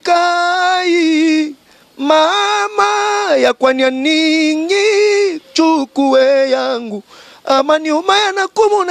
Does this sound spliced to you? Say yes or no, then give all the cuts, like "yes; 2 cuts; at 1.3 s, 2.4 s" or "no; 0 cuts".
no; 0 cuts